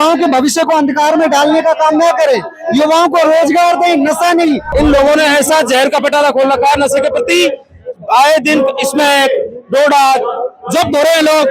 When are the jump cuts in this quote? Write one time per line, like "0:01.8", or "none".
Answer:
0:04.6